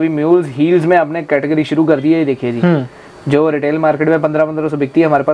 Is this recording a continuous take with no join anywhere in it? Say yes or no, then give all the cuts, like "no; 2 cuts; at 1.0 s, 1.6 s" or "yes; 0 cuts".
yes; 0 cuts